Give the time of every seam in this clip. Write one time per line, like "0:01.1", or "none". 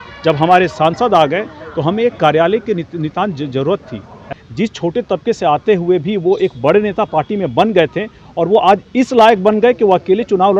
0:04.2